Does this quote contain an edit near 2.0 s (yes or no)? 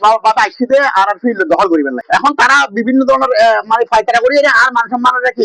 yes